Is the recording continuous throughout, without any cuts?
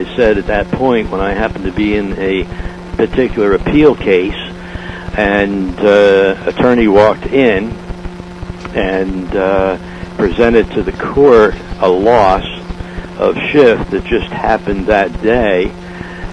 yes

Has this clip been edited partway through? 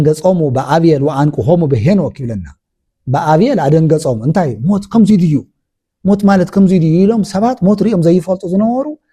no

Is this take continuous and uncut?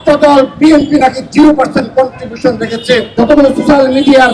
no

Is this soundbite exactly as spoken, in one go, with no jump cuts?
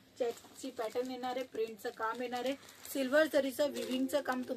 yes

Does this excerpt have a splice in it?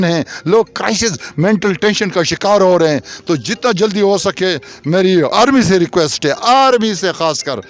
no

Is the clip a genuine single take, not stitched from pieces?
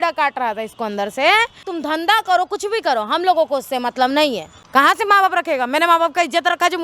no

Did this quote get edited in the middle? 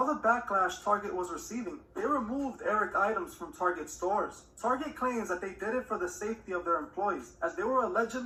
no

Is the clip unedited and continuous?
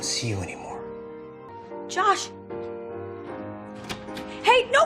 yes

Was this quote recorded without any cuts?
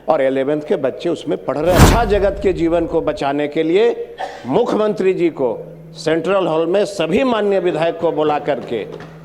no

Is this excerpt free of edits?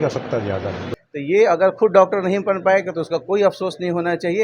no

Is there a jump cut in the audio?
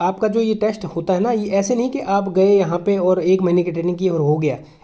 no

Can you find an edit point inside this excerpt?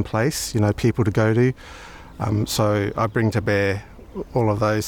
no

